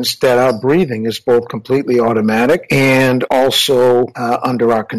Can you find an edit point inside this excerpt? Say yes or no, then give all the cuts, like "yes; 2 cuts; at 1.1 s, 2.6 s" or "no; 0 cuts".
yes; 2 cuts; at 2.9 s, 4.2 s